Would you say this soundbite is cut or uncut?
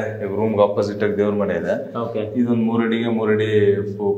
uncut